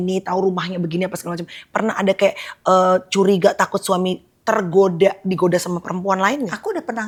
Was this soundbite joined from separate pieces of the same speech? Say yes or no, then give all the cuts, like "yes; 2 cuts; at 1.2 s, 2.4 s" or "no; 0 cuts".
no; 0 cuts